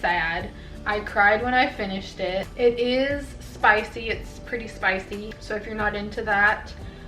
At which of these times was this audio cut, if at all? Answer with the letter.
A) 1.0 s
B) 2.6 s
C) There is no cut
C